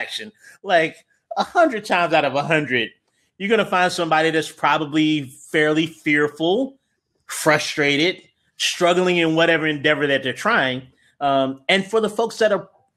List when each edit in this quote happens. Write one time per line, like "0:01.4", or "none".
none

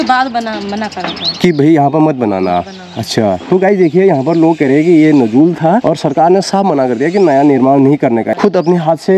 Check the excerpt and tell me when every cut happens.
0:05.8
0:08.3

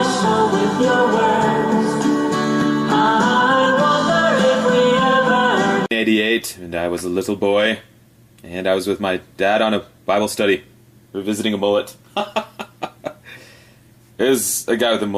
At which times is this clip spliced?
0:06.3

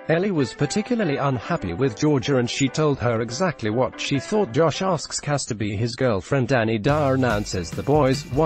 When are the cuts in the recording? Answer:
none

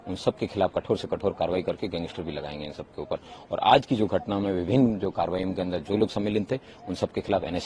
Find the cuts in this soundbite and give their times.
none

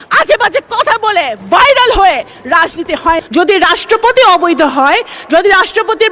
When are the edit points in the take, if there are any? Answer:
0:03.2

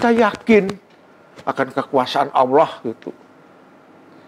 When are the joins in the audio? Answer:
none

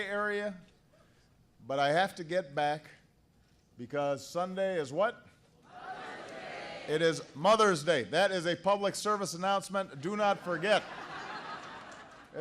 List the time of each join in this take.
0:06.4

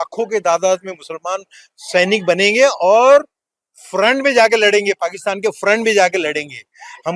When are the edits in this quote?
none

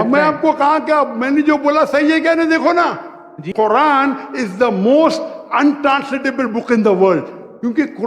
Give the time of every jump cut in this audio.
0:03.4

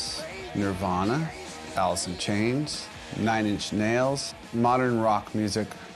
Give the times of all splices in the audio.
none

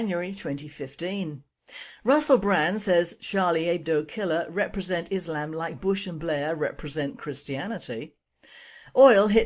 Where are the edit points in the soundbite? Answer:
none

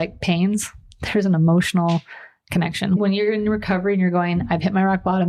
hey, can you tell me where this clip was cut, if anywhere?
0:03.0

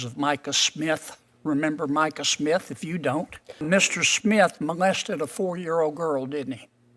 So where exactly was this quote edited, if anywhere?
0:03.6

